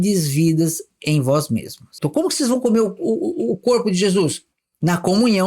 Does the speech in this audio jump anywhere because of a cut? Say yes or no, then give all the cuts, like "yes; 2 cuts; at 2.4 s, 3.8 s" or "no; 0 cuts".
yes; 1 cut; at 1.9 s